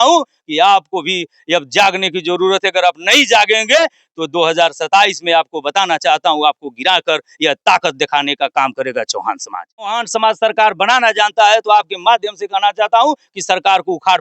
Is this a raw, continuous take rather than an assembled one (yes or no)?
no